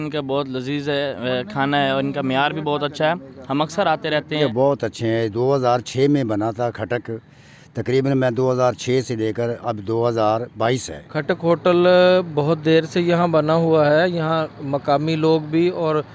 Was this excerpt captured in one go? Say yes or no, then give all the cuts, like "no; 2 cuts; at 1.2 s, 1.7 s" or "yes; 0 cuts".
no; 2 cuts; at 4.4 s, 11.0 s